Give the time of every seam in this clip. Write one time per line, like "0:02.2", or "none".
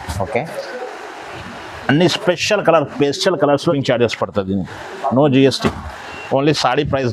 0:03.8